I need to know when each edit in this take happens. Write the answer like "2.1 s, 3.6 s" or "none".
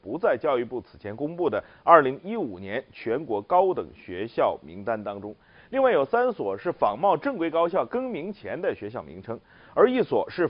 7.8 s